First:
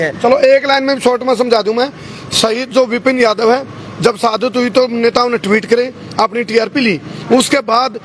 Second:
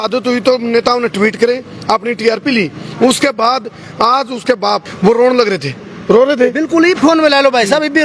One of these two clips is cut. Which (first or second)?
second